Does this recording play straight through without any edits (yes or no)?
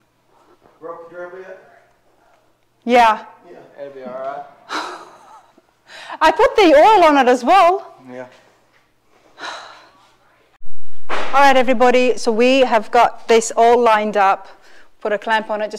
no